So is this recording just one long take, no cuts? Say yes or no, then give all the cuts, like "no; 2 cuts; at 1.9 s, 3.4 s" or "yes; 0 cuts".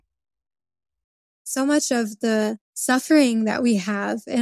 no; 2 cuts; at 1.5 s, 2.7 s